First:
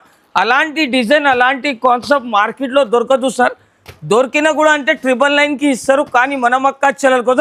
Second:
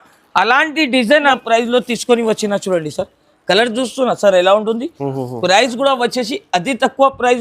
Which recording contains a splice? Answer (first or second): second